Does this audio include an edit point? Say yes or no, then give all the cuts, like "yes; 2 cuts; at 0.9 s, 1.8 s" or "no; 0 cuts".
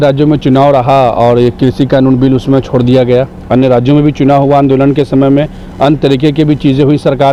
no; 0 cuts